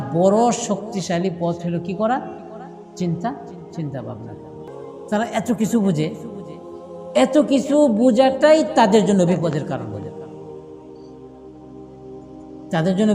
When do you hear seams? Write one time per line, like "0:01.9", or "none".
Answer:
0:04.7